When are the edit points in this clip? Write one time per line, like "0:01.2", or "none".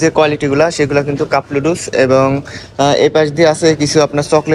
none

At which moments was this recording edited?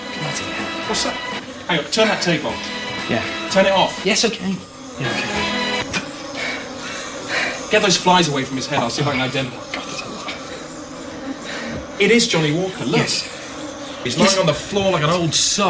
0:05.7

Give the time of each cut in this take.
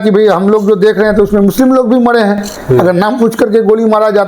none

